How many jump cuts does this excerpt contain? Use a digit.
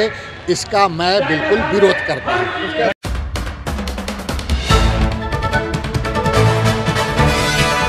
0